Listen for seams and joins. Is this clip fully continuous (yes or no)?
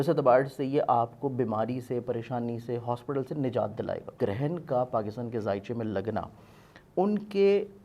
no